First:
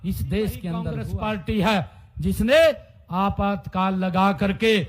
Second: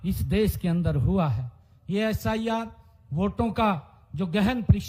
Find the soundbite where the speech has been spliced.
first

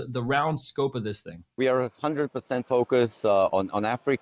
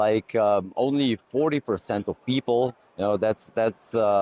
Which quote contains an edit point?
first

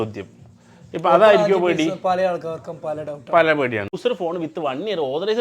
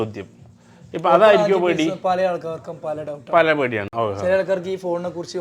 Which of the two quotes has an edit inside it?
first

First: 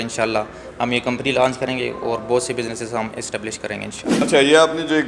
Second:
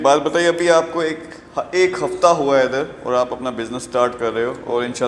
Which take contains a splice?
first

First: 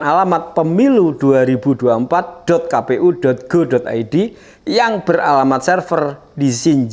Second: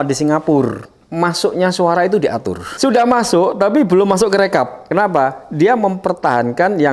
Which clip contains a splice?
second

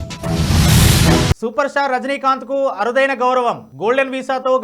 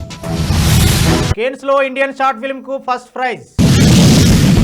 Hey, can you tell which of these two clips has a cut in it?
first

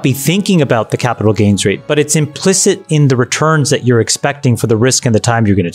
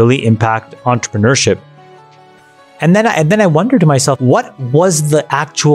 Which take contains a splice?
second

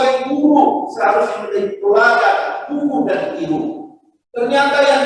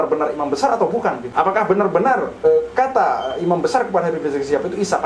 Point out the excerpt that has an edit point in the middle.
second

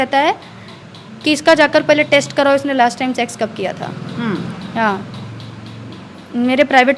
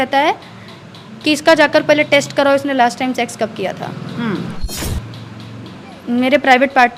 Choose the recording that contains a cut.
second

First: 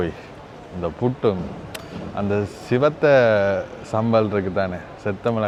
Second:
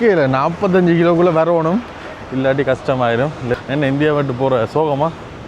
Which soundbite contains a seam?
second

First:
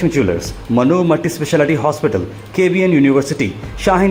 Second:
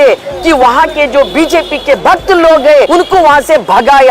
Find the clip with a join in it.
second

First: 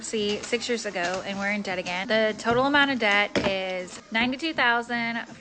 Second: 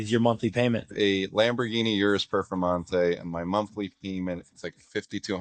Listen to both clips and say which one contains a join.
first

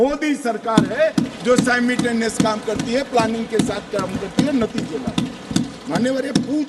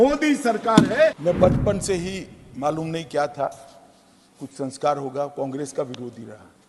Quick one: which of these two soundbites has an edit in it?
second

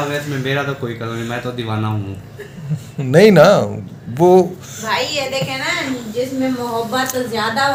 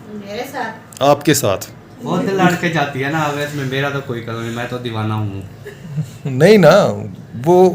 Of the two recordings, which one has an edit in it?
second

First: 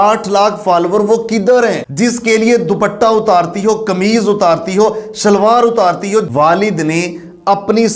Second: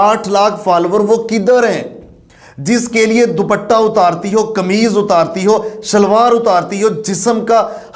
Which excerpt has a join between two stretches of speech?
first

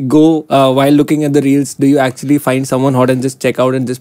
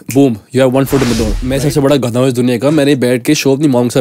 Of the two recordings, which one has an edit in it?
second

